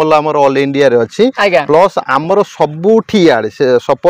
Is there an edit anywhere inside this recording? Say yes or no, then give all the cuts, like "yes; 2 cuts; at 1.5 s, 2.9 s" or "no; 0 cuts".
no; 0 cuts